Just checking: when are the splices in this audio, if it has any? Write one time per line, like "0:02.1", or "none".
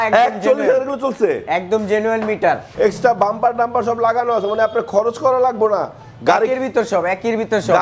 0:02.7